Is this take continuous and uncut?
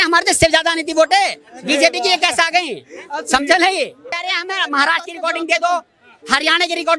no; 1 cut; at 4.3 s

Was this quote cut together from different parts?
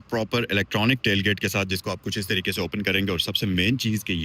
no; 0 cuts

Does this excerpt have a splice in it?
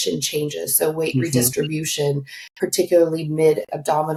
no; 0 cuts

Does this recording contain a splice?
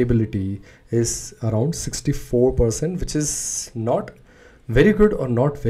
no; 0 cuts

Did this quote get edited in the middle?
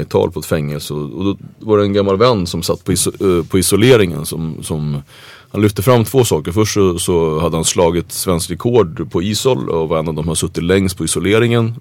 no; 0 cuts

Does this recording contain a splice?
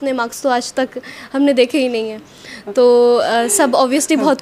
no; 0 cuts

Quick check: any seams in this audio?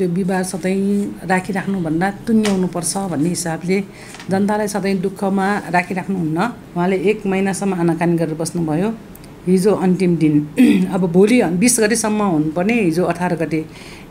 yes; 1 cut; at 6.6 s

